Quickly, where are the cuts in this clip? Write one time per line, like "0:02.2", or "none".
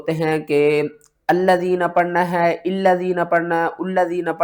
none